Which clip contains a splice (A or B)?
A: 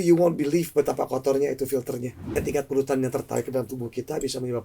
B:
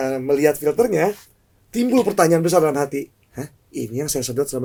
A